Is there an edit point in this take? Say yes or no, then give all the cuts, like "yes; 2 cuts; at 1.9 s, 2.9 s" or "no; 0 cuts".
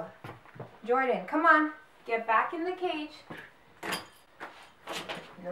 no; 0 cuts